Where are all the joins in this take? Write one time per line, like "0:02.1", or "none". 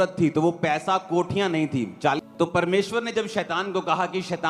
0:02.2